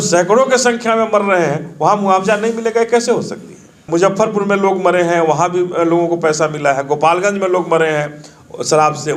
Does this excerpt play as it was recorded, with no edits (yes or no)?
no